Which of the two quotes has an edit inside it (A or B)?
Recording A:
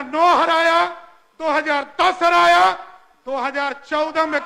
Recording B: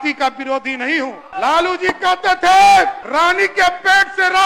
B